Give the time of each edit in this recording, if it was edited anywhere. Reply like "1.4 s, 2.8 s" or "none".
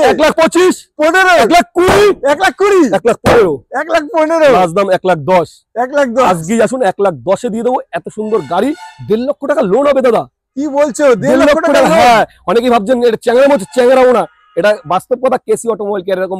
none